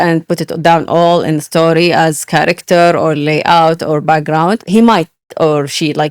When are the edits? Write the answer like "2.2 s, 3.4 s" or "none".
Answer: 4.6 s

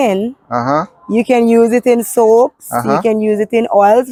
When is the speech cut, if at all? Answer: none

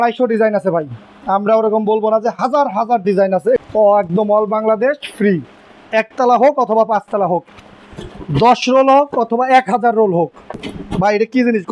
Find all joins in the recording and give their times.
3.6 s, 10.7 s

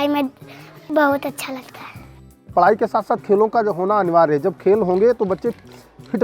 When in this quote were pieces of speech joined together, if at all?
0.9 s, 2.5 s

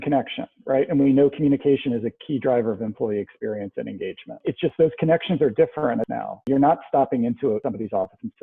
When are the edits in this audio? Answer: 4.4 s, 6.5 s, 7.6 s

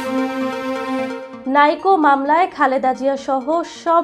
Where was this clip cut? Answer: none

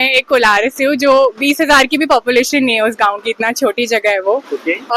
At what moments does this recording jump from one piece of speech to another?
none

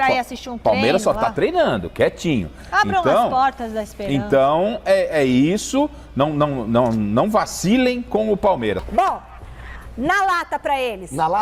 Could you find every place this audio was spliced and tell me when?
8.8 s

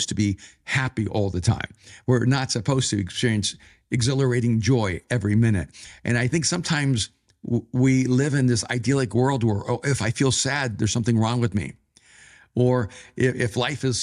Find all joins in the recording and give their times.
none

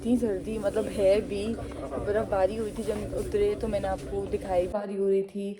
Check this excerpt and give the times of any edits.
4.7 s

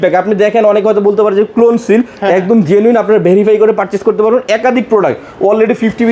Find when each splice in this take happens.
none

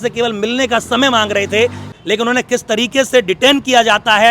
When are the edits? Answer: 1.9 s

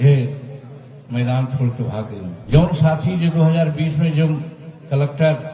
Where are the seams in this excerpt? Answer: 2.4 s

